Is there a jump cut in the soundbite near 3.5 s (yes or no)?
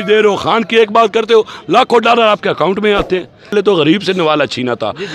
yes